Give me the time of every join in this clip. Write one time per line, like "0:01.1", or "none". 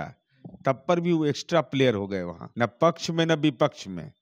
0:02.4